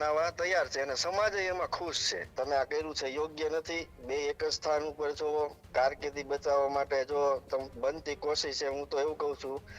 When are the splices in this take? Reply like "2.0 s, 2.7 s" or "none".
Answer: 2.2 s